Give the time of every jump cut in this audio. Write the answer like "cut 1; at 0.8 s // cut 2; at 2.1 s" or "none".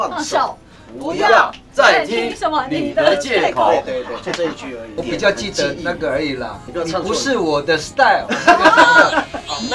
cut 1; at 4.9 s // cut 2; at 6.6 s